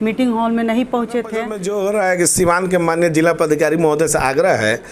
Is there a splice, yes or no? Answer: yes